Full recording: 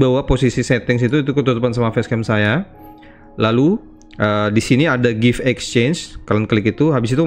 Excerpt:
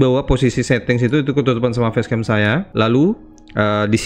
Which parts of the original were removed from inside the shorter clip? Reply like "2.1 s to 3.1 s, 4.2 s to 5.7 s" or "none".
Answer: 2.7 s to 3.3 s